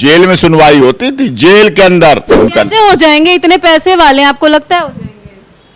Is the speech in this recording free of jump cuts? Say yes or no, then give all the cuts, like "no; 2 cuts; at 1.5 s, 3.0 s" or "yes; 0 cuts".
no; 1 cut; at 2.4 s